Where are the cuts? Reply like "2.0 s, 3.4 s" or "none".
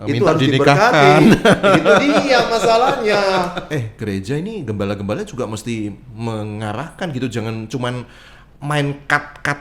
3.8 s